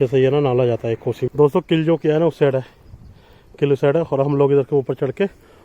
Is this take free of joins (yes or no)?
no